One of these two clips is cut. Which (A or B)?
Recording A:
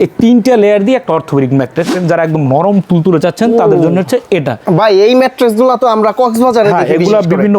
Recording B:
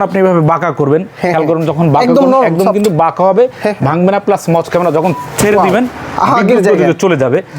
A